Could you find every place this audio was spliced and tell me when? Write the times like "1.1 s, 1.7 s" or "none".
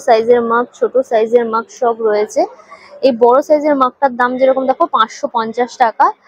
none